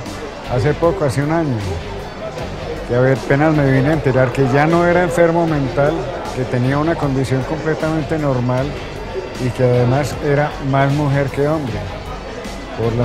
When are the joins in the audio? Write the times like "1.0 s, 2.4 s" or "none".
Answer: 8.9 s